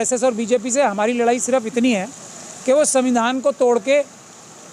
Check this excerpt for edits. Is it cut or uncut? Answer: uncut